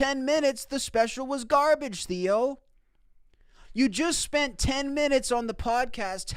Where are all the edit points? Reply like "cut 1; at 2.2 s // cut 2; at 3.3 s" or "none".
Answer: none